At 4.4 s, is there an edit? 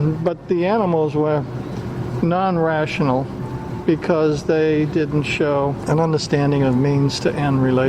no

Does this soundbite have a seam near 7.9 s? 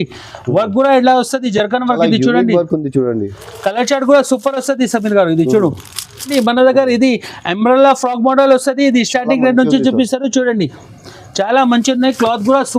no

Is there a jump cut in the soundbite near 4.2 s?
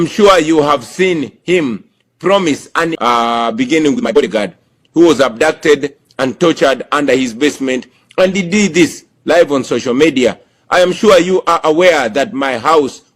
yes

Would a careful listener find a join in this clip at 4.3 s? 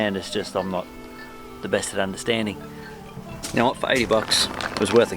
no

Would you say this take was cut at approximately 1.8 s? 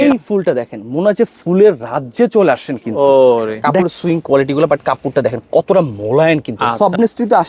no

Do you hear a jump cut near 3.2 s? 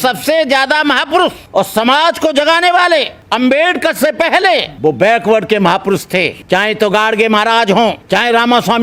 yes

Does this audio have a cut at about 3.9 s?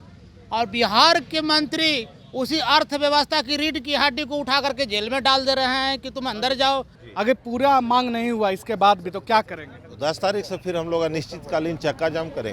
no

